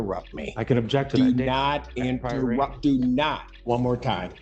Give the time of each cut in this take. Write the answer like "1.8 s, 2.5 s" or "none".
3.5 s

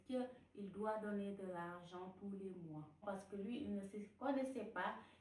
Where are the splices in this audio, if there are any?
3.0 s

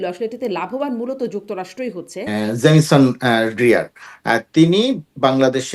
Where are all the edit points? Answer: 2.2 s

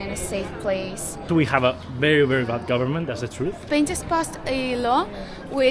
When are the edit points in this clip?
1.3 s, 3.6 s

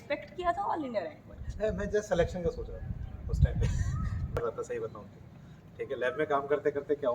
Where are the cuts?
4.4 s

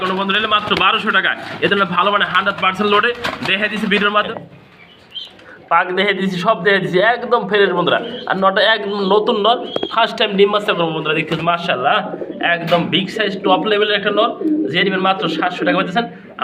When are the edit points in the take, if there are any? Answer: 4.3 s

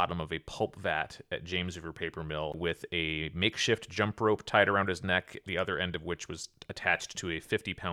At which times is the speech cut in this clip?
2.6 s

